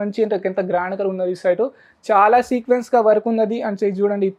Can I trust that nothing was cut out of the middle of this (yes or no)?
yes